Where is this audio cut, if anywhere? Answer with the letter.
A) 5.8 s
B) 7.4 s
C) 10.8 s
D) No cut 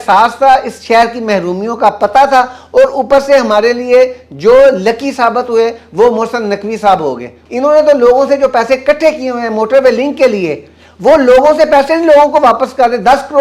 B